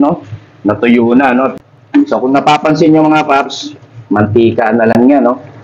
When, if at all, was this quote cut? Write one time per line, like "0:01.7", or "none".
0:01.7